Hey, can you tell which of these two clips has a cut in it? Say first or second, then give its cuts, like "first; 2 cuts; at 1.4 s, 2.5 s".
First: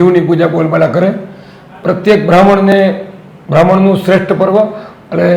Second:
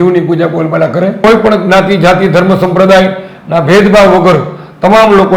second; 1 cut; at 1.2 s